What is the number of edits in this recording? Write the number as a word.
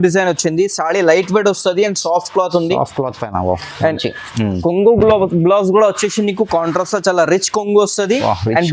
zero